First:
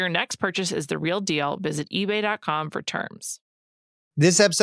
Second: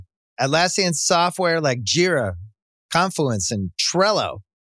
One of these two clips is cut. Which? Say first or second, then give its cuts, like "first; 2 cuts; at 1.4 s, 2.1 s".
first; 1 cut; at 3.5 s